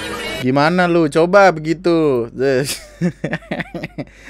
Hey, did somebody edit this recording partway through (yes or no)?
no